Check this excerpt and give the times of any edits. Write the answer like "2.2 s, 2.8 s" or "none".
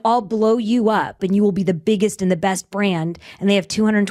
1.2 s